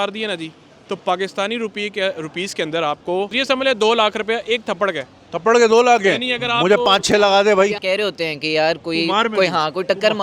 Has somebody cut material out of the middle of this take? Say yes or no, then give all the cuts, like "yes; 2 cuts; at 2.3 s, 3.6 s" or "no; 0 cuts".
yes; 2 cuts; at 3.3 s, 7.8 s